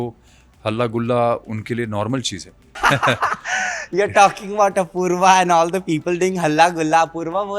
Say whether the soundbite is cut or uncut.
cut